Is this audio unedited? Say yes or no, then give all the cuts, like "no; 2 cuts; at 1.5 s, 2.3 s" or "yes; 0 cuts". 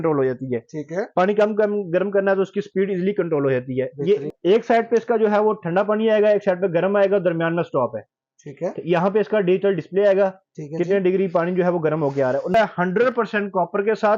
no; 2 cuts; at 4.3 s, 12.5 s